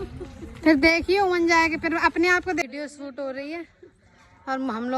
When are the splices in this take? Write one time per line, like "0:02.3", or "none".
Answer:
0:02.6

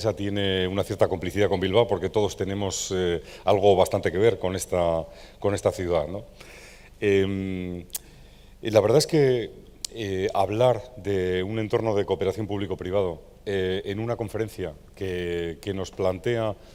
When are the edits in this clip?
none

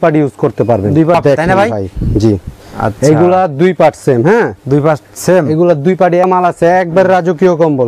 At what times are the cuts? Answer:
0:01.1
0:06.3

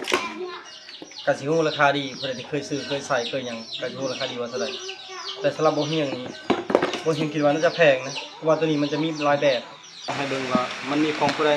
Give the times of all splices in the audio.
0:10.2

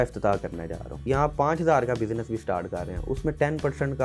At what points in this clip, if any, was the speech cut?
0:01.0

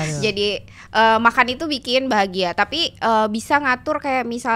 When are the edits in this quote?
none

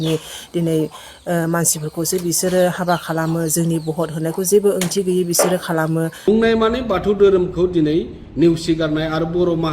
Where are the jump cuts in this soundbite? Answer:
0:06.2

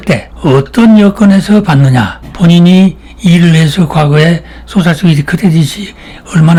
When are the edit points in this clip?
none

